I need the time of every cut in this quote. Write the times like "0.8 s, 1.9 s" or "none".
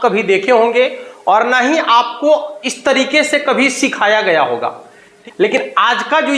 5.2 s